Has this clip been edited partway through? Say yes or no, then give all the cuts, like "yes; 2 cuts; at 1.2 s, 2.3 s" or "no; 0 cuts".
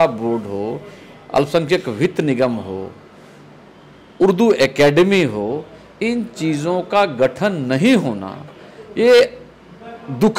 no; 0 cuts